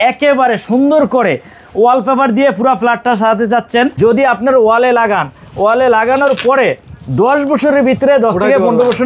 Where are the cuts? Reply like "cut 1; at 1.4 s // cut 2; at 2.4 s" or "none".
cut 1; at 3.9 s

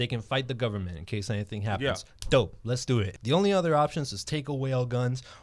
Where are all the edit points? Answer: cut 1; at 3.1 s

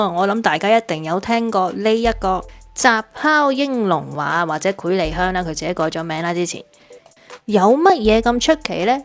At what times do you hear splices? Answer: none

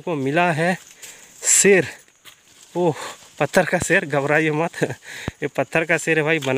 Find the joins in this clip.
none

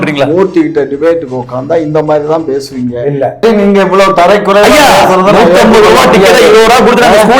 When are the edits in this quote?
cut 1; at 3.4 s

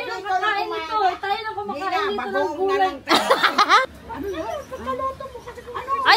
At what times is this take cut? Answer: cut 1; at 4.1 s

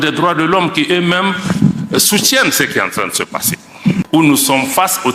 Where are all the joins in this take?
cut 1; at 4.0 s

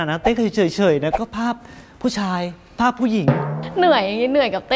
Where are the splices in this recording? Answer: cut 1; at 3.6 s

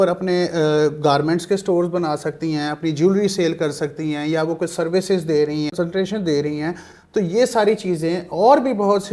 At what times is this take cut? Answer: none

